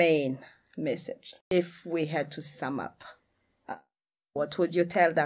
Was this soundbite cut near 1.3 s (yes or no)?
yes